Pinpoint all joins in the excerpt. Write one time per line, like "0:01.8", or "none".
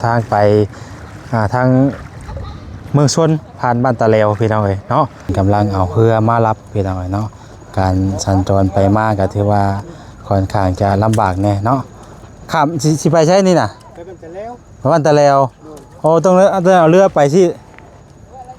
0:05.3